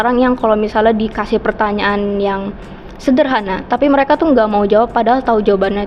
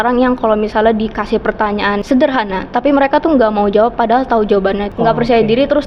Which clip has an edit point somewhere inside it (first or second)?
second